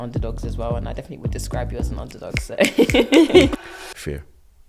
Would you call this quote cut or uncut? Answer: cut